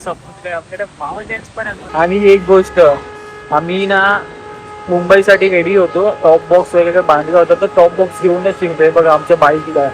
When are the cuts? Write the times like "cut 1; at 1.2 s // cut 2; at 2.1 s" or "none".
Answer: cut 1; at 1.9 s

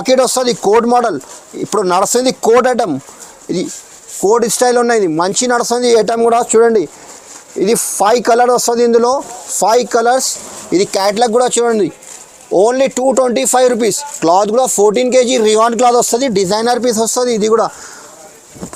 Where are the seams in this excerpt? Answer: none

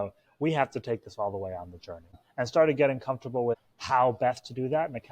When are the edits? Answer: cut 1; at 2.2 s // cut 2; at 3.7 s

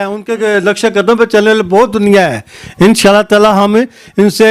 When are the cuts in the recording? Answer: none

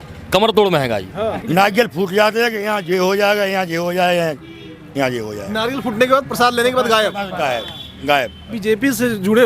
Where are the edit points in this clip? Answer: cut 1; at 1.4 s // cut 2; at 8.5 s

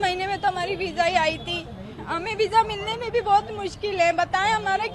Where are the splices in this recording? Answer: none

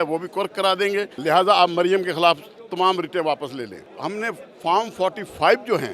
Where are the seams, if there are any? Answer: cut 1; at 1.1 s // cut 2; at 3.9 s

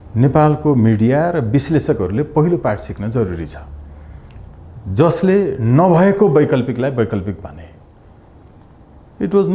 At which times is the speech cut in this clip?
none

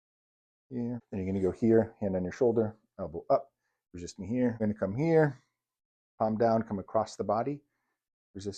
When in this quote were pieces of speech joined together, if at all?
cut 1; at 4.6 s

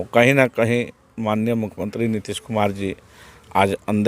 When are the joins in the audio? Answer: none

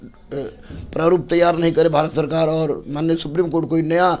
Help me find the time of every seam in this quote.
none

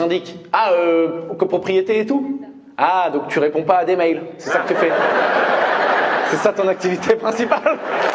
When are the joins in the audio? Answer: none

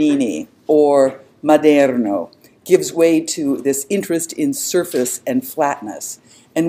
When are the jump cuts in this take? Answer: none

